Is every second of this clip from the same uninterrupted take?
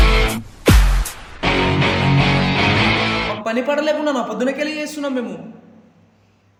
yes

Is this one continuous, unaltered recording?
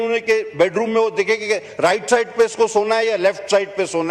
yes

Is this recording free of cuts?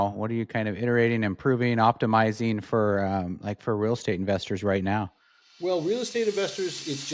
yes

